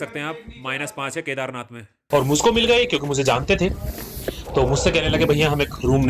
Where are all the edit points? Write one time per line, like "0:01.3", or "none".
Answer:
0:01.8